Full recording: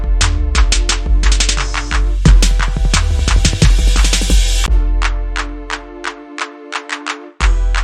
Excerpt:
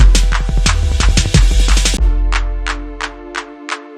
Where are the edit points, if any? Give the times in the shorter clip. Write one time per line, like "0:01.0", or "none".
0:02.0